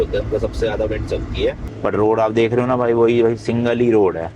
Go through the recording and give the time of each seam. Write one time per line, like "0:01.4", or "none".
0:01.7